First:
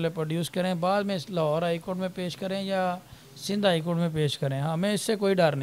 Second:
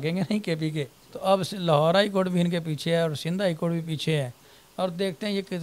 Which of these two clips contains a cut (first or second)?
second